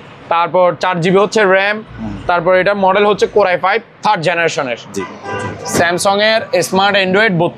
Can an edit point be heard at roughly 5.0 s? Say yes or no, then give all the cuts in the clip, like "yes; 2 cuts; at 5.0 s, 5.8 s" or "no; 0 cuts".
yes; 1 cut; at 5.0 s